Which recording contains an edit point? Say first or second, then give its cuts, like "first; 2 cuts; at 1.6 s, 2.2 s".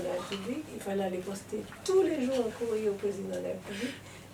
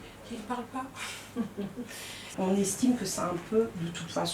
second; 1 cut; at 2.2 s